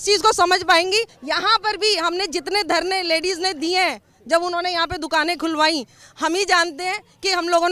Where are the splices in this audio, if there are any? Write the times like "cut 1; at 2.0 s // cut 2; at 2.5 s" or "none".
cut 1; at 1.1 s